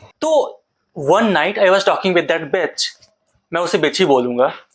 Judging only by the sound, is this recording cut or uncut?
uncut